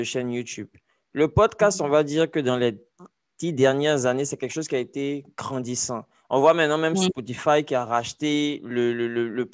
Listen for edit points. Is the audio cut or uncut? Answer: uncut